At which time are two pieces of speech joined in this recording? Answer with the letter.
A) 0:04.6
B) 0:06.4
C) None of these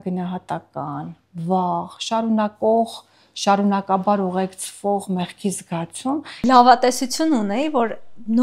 B